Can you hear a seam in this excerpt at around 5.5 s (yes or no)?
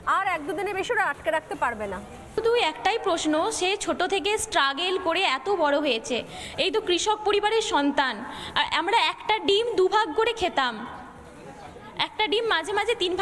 no